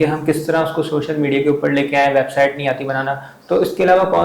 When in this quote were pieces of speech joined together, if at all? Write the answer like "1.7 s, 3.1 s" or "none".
none

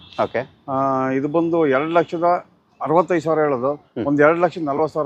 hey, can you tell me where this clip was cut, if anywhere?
none

